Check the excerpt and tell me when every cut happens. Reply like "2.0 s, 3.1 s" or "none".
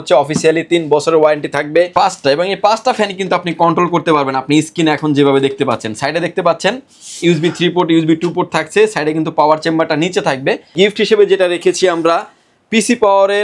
1.9 s, 10.7 s